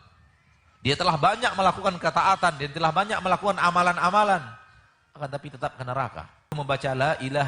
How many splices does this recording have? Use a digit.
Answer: 1